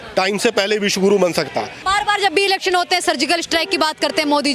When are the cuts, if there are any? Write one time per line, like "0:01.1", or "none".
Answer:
0:01.8